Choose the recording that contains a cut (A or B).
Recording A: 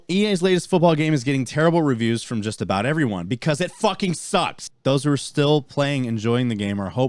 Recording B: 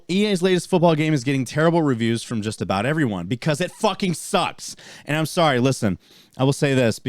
A